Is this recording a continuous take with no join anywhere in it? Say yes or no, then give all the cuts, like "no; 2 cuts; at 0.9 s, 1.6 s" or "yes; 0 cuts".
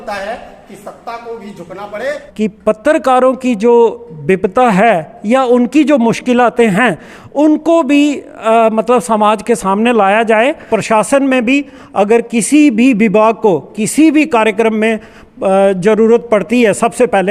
no; 2 cuts; at 2.2 s, 10.6 s